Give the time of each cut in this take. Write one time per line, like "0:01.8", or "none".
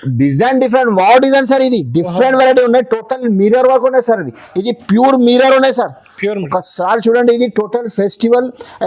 none